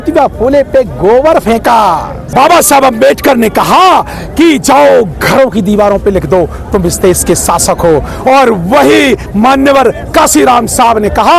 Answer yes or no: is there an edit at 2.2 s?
yes